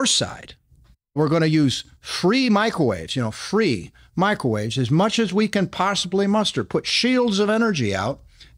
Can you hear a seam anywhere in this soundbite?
yes; 1 cut; at 1.2 s

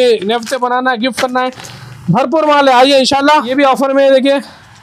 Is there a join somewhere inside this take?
yes; 1 cut; at 3.5 s

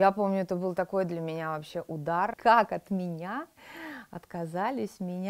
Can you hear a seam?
yes; 1 cut; at 2.4 s

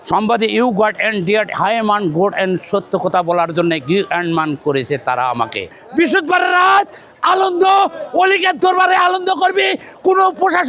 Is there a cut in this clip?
yes; 1 cut; at 5.8 s

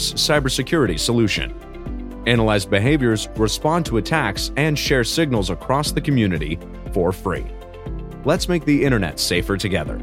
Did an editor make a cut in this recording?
no; 0 cuts

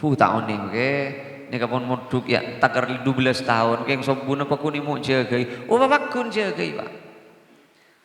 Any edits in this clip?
no; 0 cuts

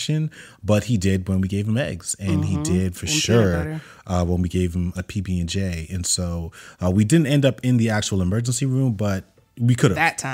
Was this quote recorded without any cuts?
no; 1 cut; at 5.0 s

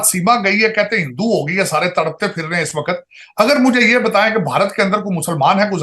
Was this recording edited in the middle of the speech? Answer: no; 0 cuts

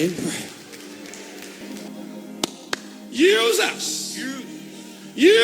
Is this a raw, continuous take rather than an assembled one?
no; 1 cut; at 1.7 s

